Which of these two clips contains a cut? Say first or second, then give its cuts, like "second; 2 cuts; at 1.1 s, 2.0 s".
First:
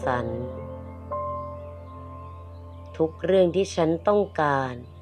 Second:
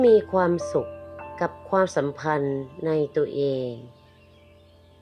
second; 1 cut; at 3.7 s